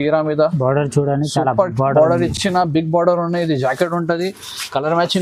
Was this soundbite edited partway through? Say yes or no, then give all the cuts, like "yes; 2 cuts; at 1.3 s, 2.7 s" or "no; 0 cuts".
no; 0 cuts